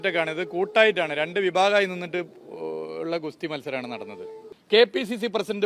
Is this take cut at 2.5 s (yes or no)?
no